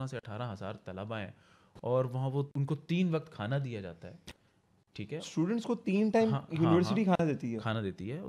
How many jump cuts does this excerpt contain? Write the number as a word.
zero